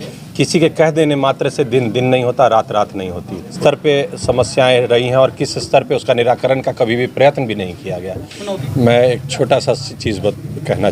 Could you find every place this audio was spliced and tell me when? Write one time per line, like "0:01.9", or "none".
0:03.6
0:08.6